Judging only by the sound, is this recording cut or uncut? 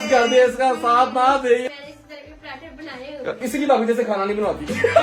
cut